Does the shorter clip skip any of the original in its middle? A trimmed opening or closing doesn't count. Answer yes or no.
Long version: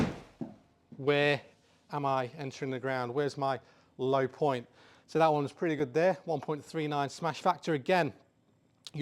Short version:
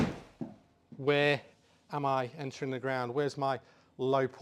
no